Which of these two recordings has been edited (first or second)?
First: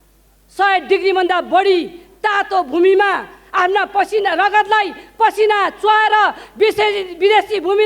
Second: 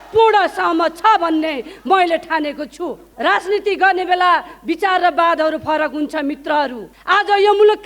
second